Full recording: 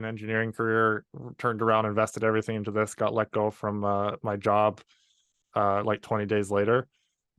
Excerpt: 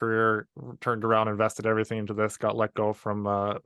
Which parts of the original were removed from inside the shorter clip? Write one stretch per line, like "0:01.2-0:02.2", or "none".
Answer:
none